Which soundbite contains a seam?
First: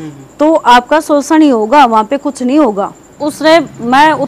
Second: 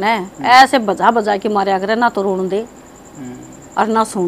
first; 1 cut; at 3.2 s

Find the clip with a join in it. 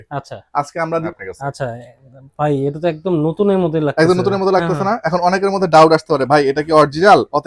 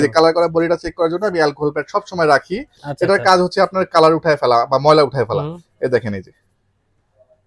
first; 1 cut; at 1.1 s

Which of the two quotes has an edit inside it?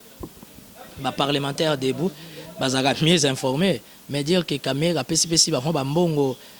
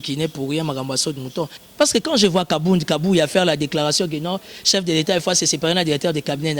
second; 1 cut; at 1.6 s

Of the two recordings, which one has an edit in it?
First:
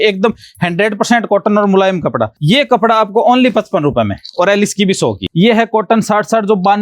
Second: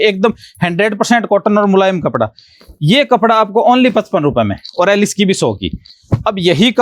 first; 2 cuts; at 2.3 s, 5.2 s

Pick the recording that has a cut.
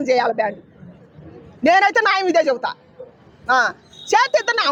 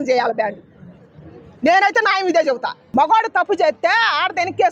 second; 1 cut; at 2.7 s

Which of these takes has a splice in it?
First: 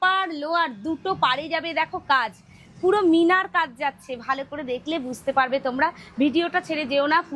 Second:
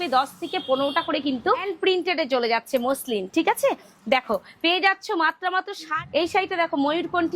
second; 2 cuts; at 1.7 s, 6.0 s

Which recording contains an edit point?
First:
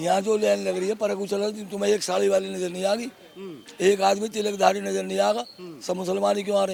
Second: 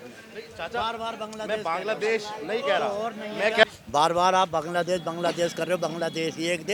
second; 1 cut; at 3.6 s

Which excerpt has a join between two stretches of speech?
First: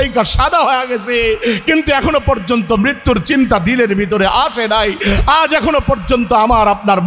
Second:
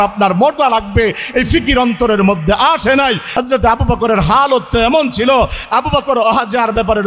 second; 1 cut; at 3.2 s

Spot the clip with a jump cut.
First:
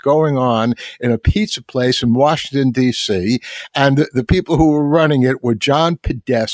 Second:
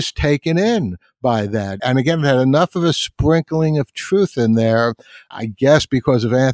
second; 2 cuts; at 1.8 s, 5.3 s

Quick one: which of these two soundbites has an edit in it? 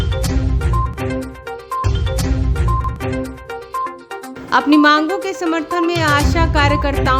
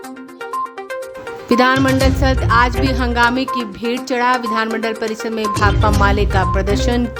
first; 1 cut; at 1.8 s

